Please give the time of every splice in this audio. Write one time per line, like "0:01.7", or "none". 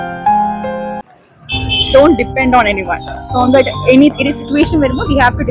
0:01.0